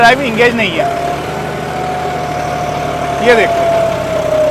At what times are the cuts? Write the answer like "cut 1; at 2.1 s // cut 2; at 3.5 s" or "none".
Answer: none